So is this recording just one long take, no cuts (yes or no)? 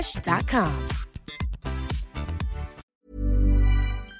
no